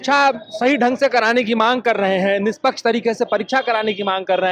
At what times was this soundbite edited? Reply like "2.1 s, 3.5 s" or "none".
none